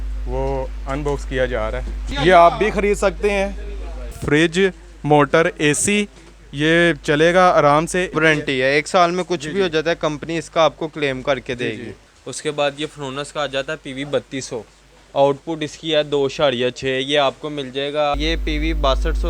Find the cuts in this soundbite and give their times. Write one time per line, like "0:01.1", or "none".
0:02.1
0:04.2
0:08.1
0:11.9
0:18.1